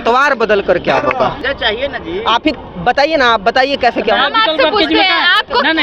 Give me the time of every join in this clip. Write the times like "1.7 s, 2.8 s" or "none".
none